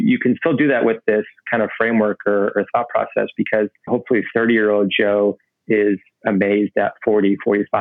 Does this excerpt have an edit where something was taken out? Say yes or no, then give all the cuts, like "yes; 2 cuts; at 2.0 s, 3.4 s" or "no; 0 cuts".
yes; 1 cut; at 3.9 s